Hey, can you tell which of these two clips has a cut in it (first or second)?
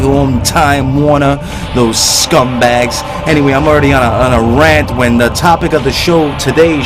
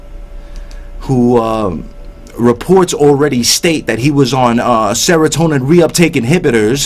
first